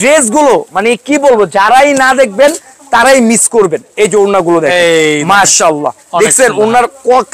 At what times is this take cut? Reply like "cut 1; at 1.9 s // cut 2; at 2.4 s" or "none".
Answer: none